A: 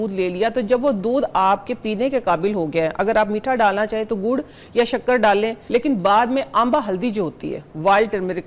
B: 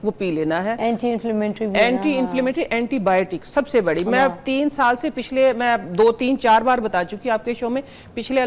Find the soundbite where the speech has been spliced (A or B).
A